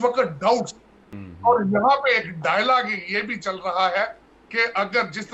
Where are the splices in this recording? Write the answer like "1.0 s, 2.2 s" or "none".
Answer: none